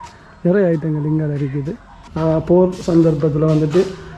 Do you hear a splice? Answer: yes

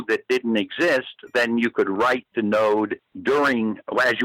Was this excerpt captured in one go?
no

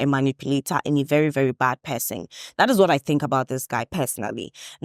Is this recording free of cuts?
yes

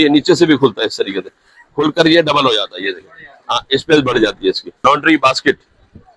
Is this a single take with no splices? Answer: no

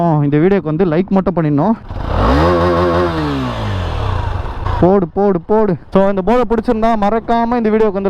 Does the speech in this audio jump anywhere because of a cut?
yes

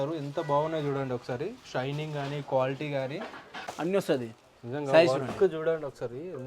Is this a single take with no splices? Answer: no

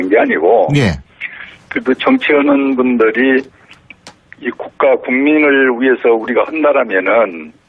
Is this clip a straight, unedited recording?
no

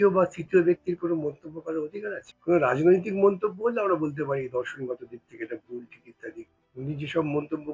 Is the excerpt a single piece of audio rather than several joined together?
no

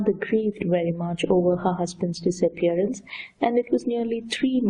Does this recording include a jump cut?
yes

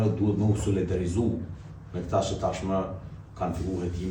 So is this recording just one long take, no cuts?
yes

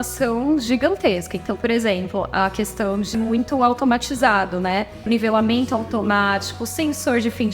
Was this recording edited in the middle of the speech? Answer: yes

